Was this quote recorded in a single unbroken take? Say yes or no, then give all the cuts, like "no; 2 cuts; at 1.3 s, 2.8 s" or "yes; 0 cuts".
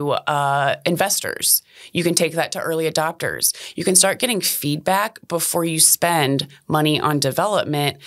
yes; 0 cuts